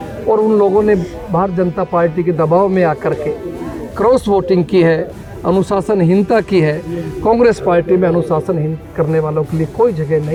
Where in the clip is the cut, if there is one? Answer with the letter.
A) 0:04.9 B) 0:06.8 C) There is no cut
C